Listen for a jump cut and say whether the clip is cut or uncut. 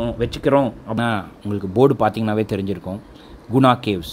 cut